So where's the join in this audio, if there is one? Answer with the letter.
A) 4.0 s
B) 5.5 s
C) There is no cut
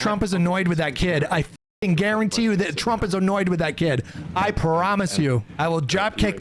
B